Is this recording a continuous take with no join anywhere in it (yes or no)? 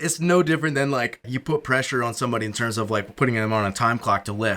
no